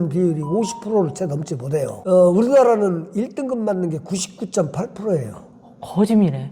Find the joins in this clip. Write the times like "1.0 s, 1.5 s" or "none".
none